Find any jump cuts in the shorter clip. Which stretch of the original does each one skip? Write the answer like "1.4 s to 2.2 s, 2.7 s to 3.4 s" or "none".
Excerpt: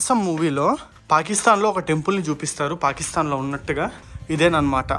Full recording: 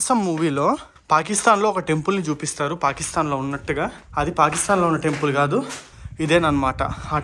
4.0 s to 5.9 s